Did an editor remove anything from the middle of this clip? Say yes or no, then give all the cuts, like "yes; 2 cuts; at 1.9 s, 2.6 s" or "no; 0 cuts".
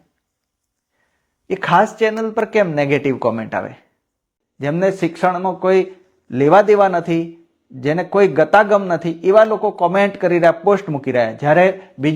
yes; 1 cut; at 4.1 s